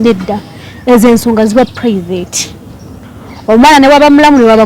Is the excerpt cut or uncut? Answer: uncut